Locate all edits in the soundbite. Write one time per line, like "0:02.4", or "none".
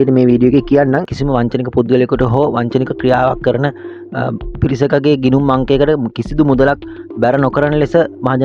0:01.1